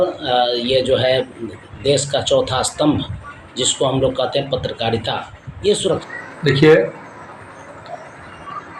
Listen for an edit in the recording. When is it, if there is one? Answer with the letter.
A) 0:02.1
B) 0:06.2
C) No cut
B